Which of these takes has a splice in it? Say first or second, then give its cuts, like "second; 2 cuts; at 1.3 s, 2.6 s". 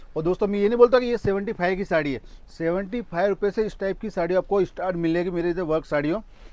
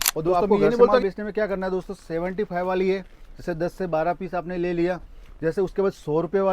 second; 1 cut; at 1.0 s